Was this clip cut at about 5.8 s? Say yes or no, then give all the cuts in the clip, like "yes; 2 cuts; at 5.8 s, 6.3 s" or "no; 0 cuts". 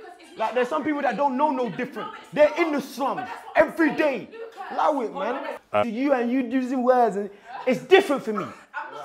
yes; 1 cut; at 5.8 s